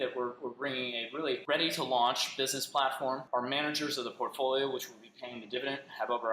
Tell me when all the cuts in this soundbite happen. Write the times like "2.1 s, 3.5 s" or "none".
1.4 s, 3.2 s